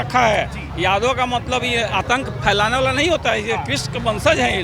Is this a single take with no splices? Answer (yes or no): yes